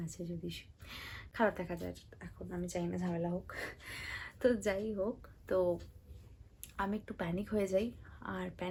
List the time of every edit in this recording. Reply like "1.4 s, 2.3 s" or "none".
none